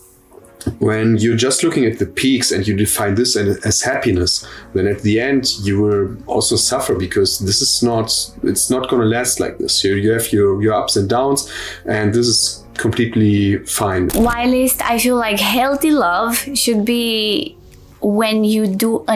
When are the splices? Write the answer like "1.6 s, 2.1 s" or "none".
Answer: 14.1 s

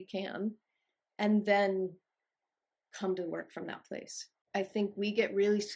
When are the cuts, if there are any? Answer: 4.4 s

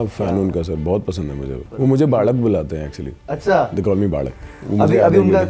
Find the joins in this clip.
1.6 s

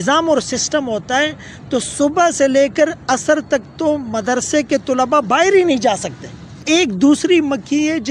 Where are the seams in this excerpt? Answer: 6.6 s

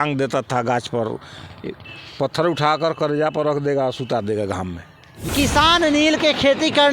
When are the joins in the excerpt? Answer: 5.3 s

